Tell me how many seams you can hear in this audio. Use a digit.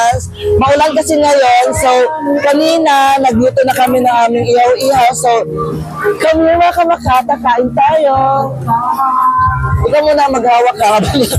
0